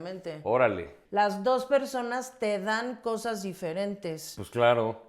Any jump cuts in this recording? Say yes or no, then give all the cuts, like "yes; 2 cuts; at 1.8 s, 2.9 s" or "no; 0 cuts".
yes; 1 cut; at 1.0 s